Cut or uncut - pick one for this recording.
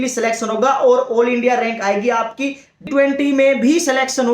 cut